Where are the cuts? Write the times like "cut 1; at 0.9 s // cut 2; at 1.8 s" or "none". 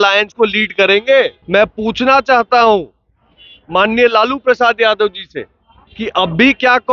cut 1; at 1.4 s